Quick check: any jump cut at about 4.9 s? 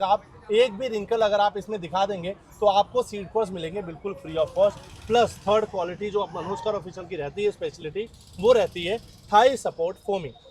no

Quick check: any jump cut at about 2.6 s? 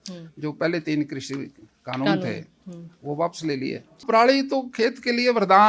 no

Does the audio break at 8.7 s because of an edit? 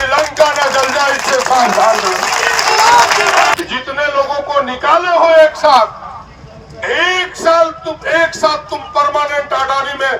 no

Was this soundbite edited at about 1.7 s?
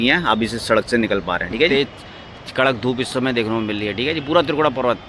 yes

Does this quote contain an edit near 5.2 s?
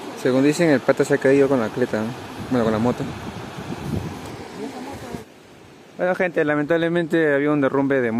yes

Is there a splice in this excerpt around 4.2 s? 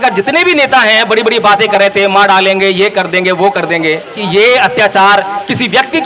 yes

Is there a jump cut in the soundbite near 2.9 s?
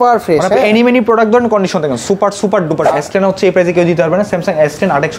yes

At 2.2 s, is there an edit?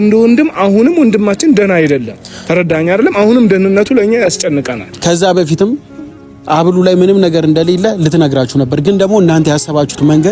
no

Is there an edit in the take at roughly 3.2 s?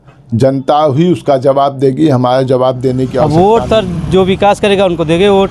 yes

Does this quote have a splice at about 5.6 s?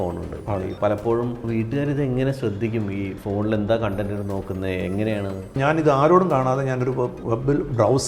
yes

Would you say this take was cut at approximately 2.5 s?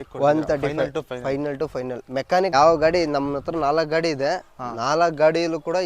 yes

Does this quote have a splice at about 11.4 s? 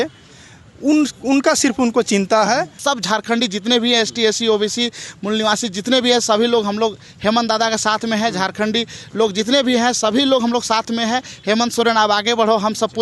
no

